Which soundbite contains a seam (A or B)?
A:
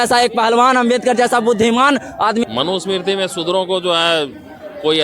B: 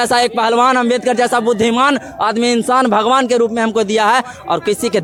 A